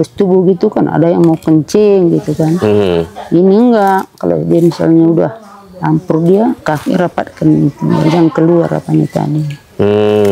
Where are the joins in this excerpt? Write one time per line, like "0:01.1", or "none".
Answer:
none